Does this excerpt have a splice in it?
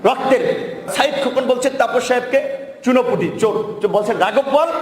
yes; 1 cut; at 0.9 s

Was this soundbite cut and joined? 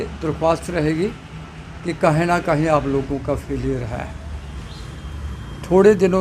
no; 0 cuts

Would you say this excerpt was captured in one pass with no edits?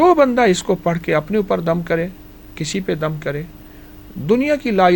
yes; 0 cuts

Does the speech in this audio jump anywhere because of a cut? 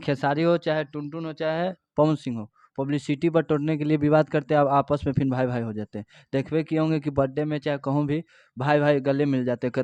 no; 0 cuts

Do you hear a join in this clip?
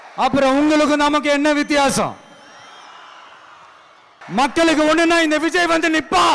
yes; 1 cut; at 4.2 s

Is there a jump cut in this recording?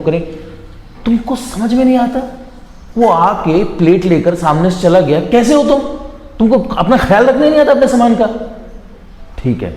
no; 0 cuts

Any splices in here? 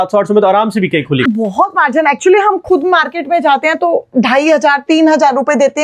yes; 2 cuts; at 1.2 s, 2.6 s

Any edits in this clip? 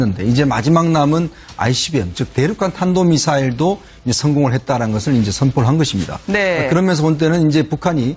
yes; 1 cut; at 3.3 s

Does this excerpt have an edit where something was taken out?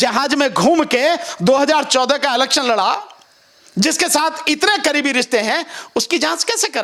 no; 0 cuts

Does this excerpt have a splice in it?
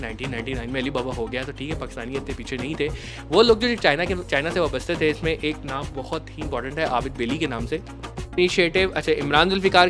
yes; 1 cut; at 8.4 s

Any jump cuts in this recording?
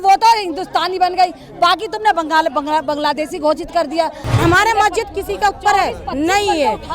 yes; 1 cut; at 4.3 s

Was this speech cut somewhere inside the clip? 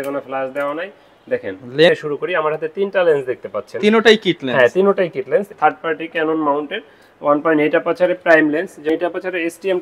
yes; 3 cuts; at 1.9 s, 5.5 s, 8.9 s

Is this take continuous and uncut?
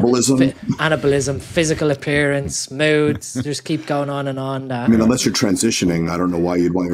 yes; 0 cuts

